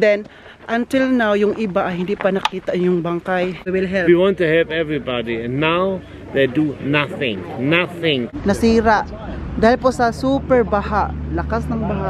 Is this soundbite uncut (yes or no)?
no